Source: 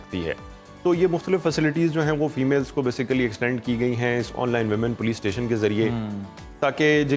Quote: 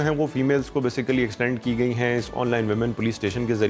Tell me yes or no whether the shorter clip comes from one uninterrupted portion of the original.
yes